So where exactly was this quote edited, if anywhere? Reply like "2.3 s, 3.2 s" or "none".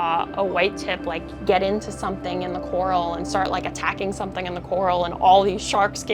none